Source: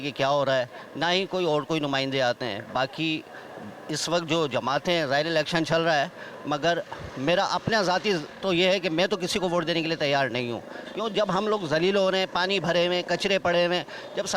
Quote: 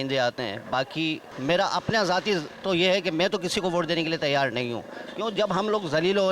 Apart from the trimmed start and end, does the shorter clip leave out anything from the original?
yes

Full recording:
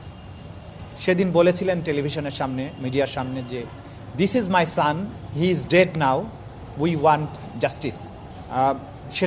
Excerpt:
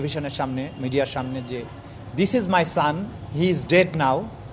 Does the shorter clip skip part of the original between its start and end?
no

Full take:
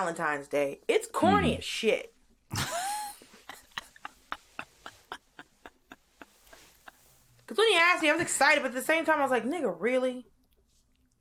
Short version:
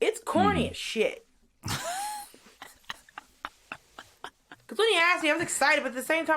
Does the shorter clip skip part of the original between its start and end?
yes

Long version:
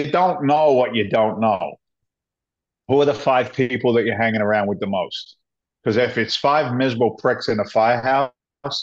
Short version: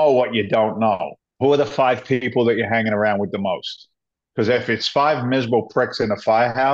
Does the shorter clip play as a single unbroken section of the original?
no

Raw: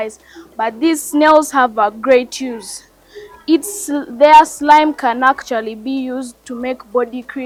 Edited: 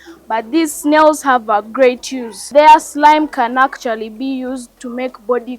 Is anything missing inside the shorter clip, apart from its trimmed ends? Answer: yes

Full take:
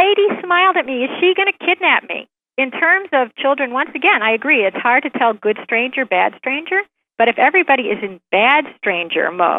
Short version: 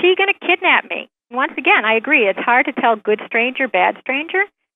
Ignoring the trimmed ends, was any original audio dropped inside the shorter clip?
yes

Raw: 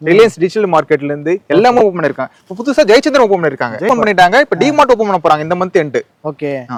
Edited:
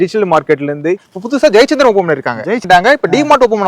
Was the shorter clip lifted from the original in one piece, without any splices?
no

